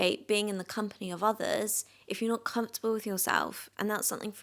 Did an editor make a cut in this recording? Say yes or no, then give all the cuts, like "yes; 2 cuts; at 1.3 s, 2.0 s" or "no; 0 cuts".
no; 0 cuts